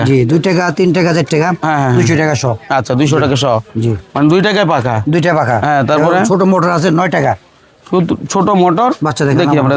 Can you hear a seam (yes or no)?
no